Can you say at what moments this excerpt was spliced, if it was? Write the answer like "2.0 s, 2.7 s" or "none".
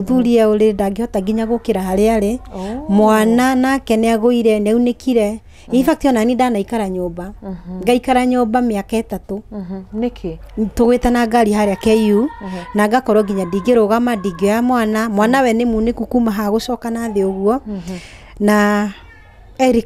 none